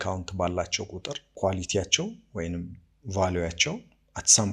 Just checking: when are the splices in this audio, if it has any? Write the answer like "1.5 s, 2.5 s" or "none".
1.2 s